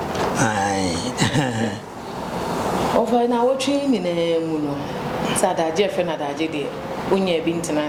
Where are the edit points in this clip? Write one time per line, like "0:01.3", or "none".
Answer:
none